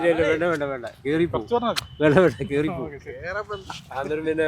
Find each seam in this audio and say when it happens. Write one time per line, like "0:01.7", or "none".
none